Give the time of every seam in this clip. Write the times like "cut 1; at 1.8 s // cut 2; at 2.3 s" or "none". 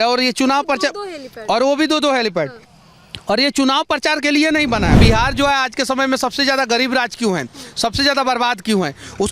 cut 1; at 5.0 s